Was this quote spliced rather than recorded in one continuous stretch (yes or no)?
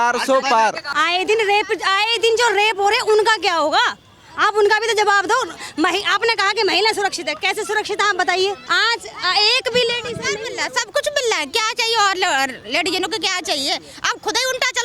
yes